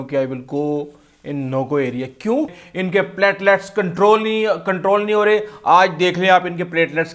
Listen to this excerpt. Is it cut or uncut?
cut